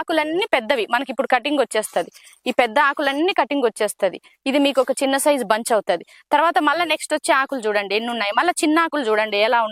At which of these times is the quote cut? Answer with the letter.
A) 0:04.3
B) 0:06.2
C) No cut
C